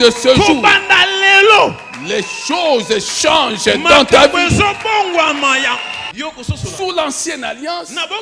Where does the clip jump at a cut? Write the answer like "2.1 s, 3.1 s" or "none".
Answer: 6.1 s